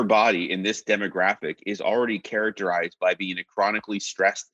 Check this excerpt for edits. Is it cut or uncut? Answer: uncut